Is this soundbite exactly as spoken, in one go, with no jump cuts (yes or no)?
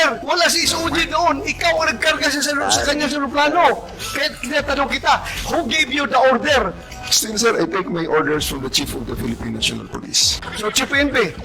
no